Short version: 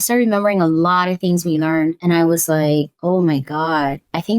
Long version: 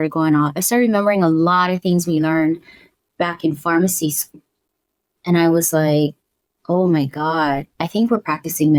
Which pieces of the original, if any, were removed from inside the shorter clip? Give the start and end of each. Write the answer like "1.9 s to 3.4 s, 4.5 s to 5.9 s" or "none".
2.6 s to 5.2 s, 6.2 s to 6.6 s